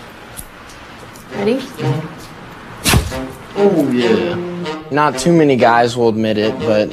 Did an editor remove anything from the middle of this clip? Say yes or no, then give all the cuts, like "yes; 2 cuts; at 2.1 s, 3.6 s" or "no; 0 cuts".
no; 0 cuts